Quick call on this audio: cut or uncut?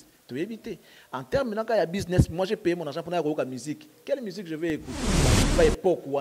cut